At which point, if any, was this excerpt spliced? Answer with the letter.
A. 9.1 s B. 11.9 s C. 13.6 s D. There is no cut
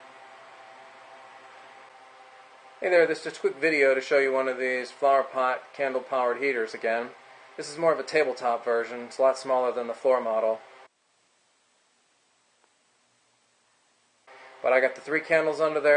B